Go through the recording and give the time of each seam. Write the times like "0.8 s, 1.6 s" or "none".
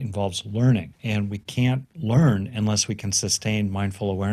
0.9 s, 1.9 s

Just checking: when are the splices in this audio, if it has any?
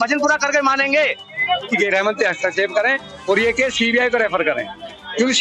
1.6 s

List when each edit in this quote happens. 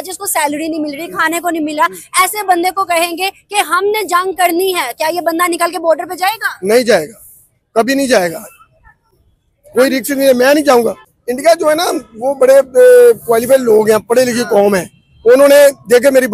11.0 s

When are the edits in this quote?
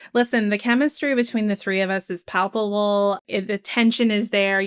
3.2 s

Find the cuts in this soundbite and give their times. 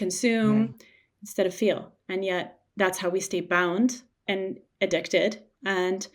4.2 s

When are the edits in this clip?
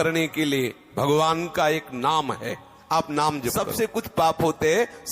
3.5 s

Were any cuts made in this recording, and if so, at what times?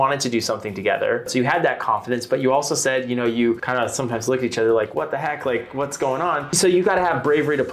1.3 s, 3.7 s, 6.5 s

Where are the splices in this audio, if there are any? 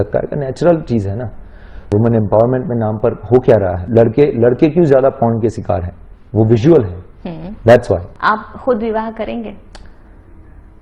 1.8 s, 3.8 s, 8.1 s

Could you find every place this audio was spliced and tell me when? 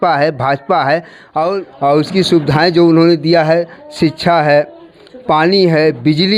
1.7 s

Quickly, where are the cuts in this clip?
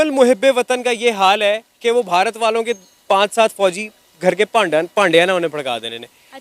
none

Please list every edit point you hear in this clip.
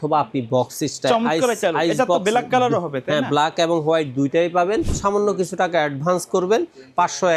4.9 s

